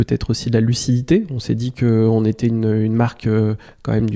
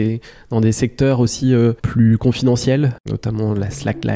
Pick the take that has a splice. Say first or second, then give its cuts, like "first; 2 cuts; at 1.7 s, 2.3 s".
second; 2 cuts; at 1.8 s, 3.0 s